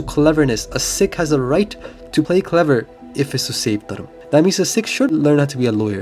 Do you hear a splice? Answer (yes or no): yes